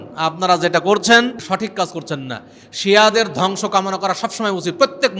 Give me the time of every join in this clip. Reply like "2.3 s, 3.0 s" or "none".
1.4 s